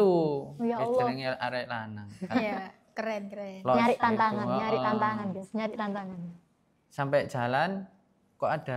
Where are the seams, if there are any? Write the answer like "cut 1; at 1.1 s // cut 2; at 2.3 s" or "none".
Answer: none

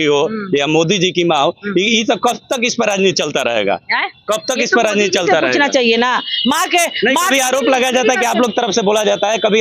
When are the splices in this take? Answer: none

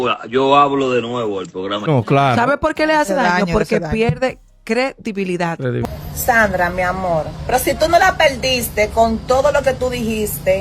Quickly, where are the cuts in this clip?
cut 1; at 1.9 s // cut 2; at 5.8 s

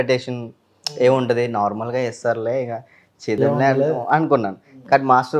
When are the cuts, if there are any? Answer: none

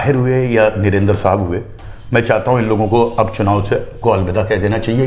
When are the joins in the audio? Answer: none

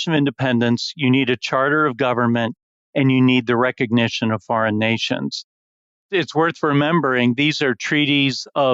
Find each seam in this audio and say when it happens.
cut 1; at 5.9 s

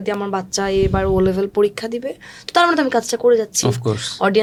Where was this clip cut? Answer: none

